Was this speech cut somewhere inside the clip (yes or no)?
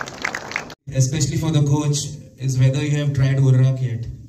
yes